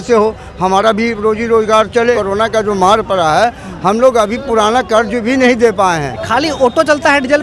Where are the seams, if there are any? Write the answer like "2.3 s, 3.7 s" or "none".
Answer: 2.2 s, 6.1 s